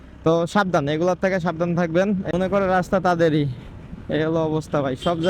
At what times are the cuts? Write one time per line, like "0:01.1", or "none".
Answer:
0:02.3